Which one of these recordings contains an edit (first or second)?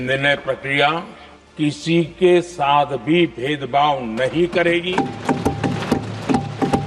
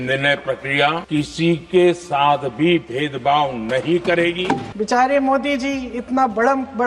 second